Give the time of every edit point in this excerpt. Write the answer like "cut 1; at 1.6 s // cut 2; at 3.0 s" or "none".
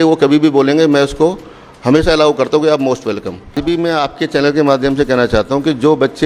cut 1; at 3.6 s